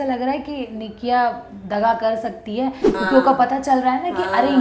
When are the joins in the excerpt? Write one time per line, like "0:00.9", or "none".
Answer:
0:02.9